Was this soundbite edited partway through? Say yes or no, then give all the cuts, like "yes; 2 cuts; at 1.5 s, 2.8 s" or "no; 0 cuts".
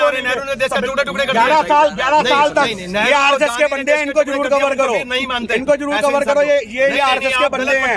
no; 0 cuts